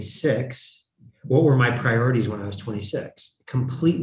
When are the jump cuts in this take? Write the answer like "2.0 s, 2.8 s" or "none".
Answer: none